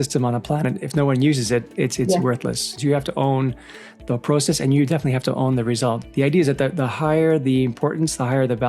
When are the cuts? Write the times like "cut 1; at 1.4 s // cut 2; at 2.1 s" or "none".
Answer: cut 1; at 2.7 s // cut 2; at 6.0 s

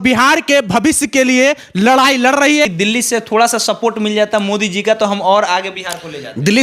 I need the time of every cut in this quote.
cut 1; at 2.7 s

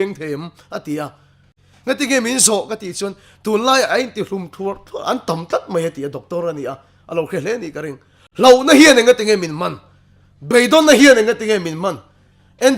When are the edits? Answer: cut 1; at 1.5 s

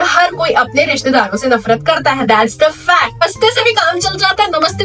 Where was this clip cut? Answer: cut 1; at 3.2 s

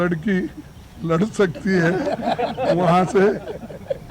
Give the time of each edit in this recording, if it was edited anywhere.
none

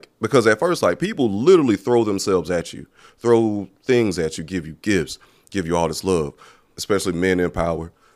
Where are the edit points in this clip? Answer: cut 1; at 6.7 s

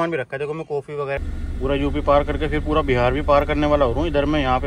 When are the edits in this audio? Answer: cut 1; at 1.2 s

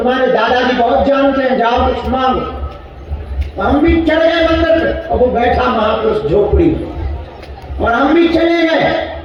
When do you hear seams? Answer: none

